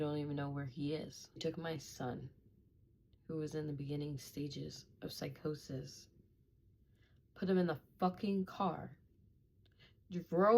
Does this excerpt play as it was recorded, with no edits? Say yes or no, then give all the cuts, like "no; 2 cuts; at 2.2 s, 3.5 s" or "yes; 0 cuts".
no; 1 cut; at 1.4 s